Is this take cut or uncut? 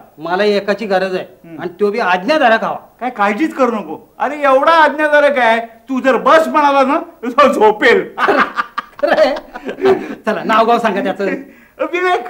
uncut